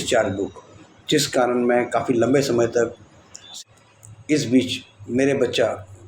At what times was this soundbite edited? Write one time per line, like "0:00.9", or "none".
0:03.4